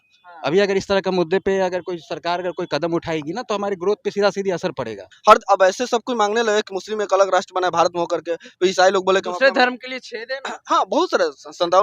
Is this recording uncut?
no; 1 cut; at 5.0 s

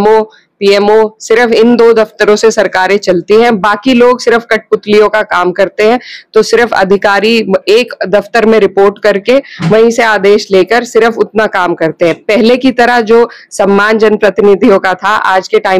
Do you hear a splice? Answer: no; 0 cuts

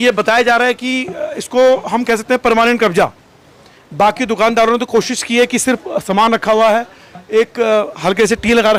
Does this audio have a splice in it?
no; 0 cuts

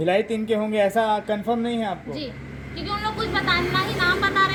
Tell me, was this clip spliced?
no; 0 cuts

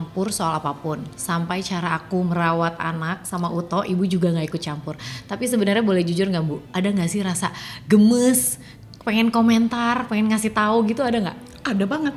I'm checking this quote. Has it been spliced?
no; 0 cuts

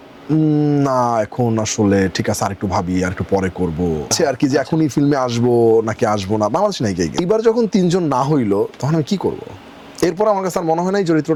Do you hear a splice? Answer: no; 0 cuts

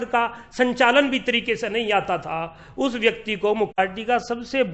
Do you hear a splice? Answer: yes; 1 cut; at 3.8 s

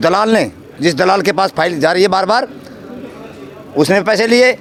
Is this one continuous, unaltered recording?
yes; 0 cuts

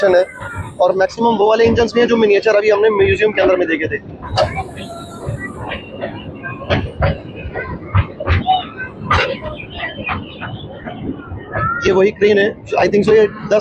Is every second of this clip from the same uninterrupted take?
yes; 0 cuts

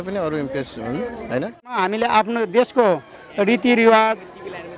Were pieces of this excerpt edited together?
yes; 1 cut; at 1.8 s

